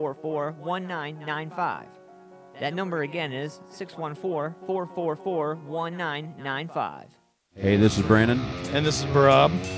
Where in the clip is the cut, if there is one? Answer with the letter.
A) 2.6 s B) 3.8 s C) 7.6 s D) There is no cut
C